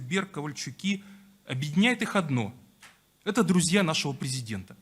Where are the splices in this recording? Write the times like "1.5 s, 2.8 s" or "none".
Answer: none